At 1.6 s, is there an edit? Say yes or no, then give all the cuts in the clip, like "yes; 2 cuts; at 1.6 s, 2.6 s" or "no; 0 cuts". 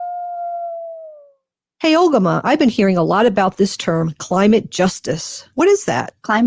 yes; 1 cut; at 1.6 s